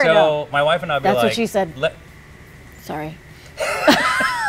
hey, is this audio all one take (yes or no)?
yes